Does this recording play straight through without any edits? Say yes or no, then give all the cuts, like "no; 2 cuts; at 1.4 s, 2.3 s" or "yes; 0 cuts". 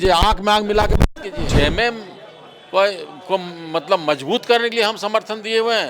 no; 1 cut; at 1.4 s